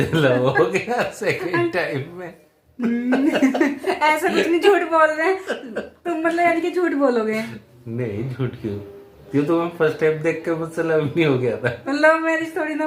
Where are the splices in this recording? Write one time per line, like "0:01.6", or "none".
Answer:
none